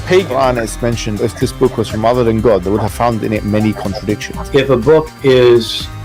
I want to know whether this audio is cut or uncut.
cut